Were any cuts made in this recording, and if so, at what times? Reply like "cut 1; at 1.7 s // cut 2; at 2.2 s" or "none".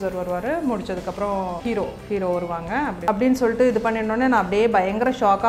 cut 1; at 1.6 s // cut 2; at 3.0 s